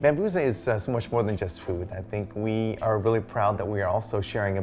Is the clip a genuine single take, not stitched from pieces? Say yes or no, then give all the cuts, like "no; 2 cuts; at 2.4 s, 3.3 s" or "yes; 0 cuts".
yes; 0 cuts